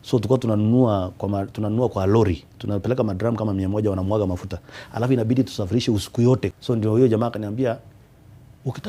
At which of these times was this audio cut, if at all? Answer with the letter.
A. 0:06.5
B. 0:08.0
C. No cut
A